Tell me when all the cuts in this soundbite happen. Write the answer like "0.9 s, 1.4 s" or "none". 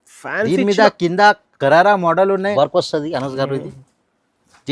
2.5 s